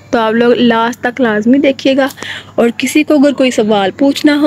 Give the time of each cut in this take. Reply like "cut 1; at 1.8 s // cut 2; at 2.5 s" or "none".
none